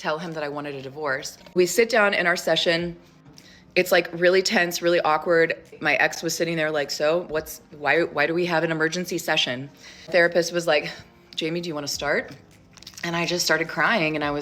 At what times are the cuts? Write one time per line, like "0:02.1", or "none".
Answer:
0:01.3